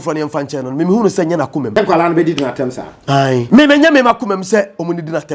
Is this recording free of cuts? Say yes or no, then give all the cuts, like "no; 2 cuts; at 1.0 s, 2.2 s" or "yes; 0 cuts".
no; 2 cuts; at 1.7 s, 3.5 s